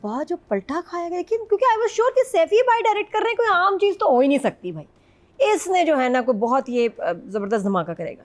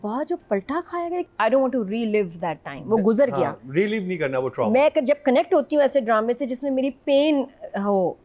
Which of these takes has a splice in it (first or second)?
second